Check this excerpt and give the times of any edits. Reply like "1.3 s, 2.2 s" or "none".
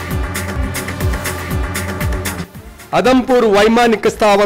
2.4 s